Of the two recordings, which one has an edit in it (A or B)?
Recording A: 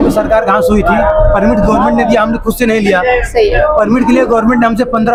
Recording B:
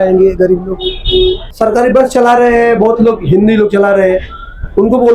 B